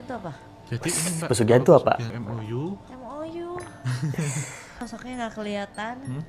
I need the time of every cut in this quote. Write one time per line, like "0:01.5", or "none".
0:02.1
0:04.8